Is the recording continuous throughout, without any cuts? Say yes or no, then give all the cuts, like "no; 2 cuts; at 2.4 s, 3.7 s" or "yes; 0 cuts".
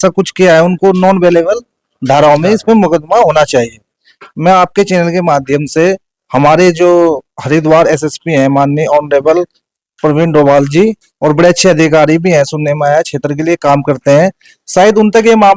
yes; 0 cuts